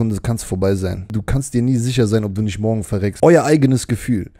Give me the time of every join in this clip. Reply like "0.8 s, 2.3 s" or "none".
1.2 s, 3.1 s